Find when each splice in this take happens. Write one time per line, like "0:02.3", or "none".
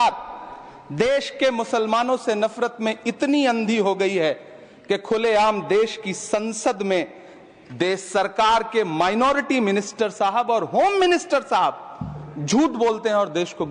none